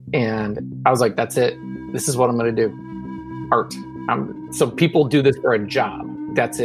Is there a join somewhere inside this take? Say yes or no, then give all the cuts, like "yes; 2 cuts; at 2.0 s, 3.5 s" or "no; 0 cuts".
no; 0 cuts